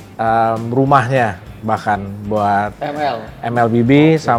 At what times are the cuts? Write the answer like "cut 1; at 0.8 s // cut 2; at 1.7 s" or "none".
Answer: none

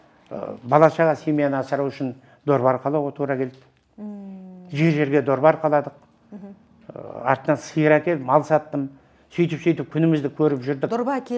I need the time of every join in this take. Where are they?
none

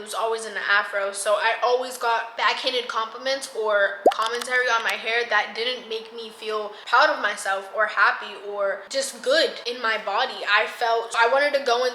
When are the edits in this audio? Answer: cut 1; at 6.8 s // cut 2; at 9.7 s // cut 3; at 11.2 s

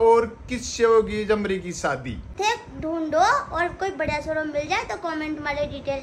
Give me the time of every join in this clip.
cut 1; at 2.2 s

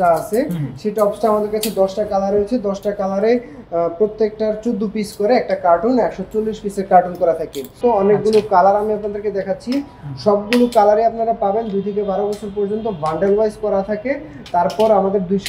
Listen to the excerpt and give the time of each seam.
cut 1; at 7.7 s

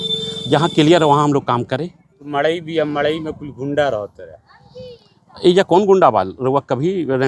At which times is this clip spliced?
cut 1; at 2.3 s

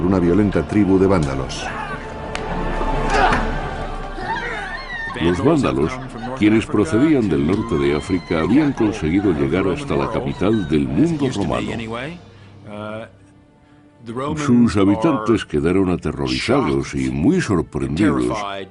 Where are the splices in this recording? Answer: cut 1; at 12.4 s

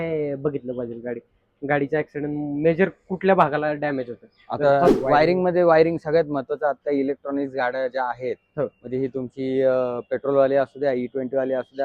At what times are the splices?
cut 1; at 4.9 s

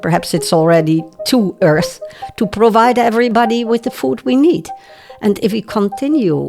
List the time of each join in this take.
cut 1; at 3.3 s

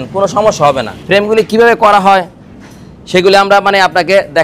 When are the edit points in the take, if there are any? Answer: cut 1; at 0.9 s

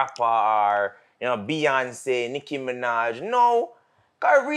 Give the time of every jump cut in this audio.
none

